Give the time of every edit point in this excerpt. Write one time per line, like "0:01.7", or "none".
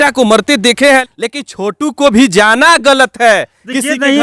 0:01.0

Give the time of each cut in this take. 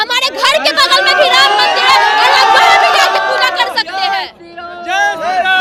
none

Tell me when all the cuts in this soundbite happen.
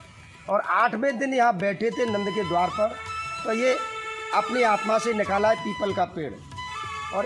none

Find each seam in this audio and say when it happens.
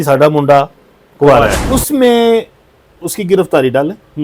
0:01.6

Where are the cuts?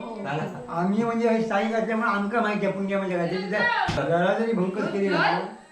none

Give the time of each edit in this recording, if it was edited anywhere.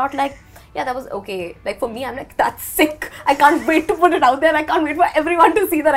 none

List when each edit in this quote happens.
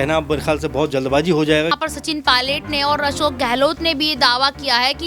0:01.8

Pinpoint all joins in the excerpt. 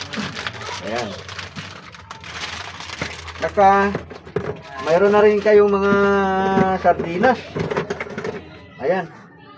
none

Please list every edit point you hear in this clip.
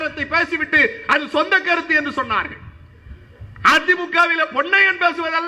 none

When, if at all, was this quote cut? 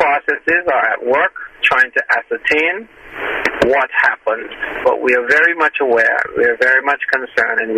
none

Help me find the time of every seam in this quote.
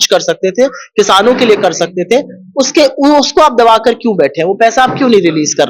none

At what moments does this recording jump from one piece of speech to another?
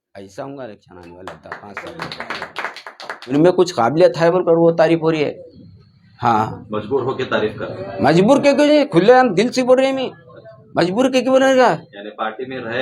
0:03.3

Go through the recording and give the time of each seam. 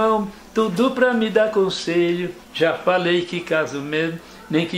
0:02.4

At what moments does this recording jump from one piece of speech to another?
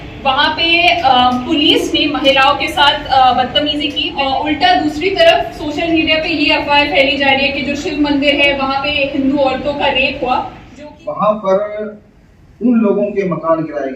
0:04.0
0:10.6

